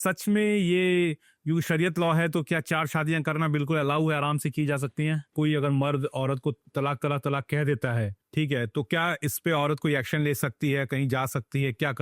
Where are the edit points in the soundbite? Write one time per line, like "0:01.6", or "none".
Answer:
0:05.3
0:06.6
0:08.2